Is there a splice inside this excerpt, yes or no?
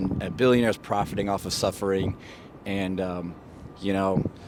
no